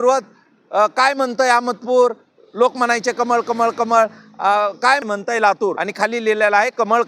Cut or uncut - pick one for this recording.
cut